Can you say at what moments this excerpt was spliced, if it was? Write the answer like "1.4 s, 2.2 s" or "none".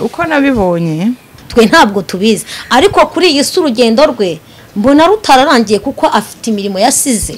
1.3 s